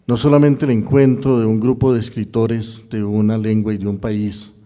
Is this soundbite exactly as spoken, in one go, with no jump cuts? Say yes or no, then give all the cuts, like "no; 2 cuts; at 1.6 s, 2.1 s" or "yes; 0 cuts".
no; 1 cut; at 1.8 s